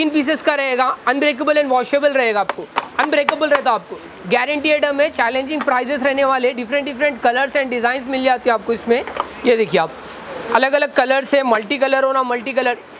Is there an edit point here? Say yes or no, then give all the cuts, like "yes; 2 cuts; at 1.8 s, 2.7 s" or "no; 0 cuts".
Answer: no; 0 cuts